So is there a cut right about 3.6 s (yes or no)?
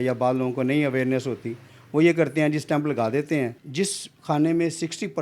yes